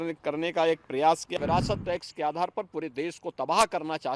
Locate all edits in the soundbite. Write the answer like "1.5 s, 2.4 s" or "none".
1.4 s